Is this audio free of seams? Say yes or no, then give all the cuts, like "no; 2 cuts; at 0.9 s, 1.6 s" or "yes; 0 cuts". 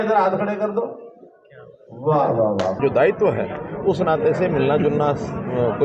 no; 1 cut; at 2.8 s